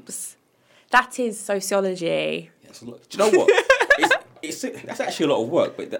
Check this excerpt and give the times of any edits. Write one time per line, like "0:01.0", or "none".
none